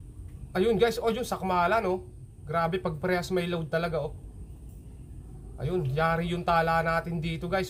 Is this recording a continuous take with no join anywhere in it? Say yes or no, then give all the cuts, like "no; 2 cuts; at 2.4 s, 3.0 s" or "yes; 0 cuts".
yes; 0 cuts